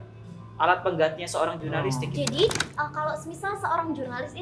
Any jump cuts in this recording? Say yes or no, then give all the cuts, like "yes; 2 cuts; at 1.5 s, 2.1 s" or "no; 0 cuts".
yes; 1 cut; at 2.0 s